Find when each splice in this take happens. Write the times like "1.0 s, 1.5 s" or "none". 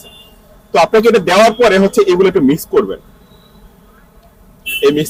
none